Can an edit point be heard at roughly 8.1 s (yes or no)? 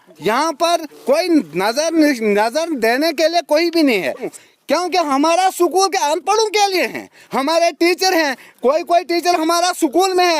no